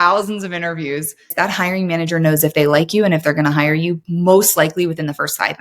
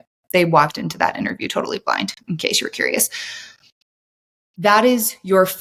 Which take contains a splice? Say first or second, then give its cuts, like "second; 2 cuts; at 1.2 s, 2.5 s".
first; 1 cut; at 1.3 s